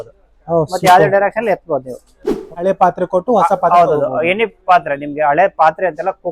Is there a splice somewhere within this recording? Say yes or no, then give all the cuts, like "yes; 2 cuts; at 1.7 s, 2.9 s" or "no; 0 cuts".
yes; 1 cut; at 2.6 s